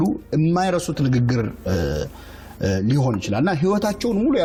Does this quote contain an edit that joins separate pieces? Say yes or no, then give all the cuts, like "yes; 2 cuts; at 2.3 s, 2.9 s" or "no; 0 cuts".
no; 0 cuts